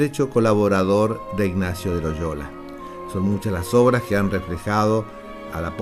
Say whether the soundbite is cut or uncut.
cut